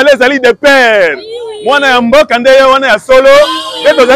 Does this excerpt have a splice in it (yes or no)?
no